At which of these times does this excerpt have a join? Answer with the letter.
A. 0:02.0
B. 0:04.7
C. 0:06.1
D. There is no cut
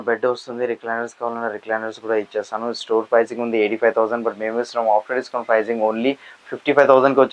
D